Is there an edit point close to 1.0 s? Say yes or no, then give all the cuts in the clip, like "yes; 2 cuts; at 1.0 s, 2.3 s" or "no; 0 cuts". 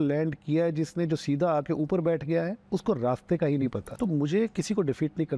no; 2 cuts; at 2.6 s, 3.8 s